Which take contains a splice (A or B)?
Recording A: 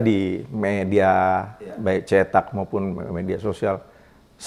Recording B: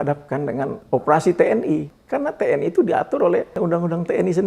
B